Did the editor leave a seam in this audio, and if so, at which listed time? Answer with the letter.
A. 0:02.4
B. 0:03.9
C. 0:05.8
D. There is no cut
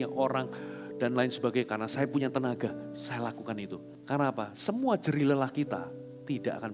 B